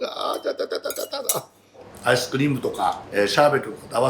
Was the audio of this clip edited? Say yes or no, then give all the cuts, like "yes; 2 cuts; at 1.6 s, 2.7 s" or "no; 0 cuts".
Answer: yes; 2 cuts; at 1.9 s, 3.0 s